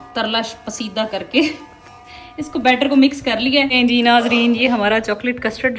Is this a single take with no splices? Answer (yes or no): no